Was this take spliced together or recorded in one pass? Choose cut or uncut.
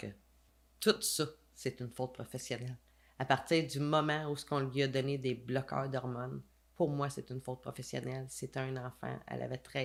uncut